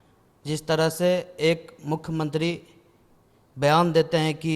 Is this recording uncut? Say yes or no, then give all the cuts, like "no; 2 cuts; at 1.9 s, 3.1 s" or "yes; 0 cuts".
yes; 0 cuts